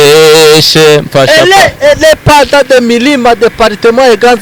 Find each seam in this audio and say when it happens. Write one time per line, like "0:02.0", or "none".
none